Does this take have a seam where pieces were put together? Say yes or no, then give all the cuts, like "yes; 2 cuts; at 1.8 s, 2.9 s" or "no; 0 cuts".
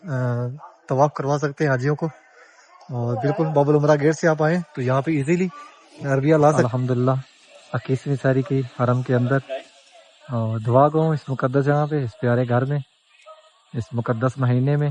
yes; 1 cut; at 6.7 s